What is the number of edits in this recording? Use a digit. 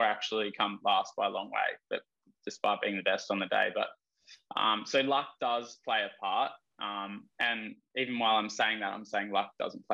0